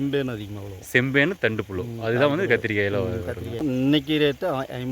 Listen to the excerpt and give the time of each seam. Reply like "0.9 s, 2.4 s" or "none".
3.6 s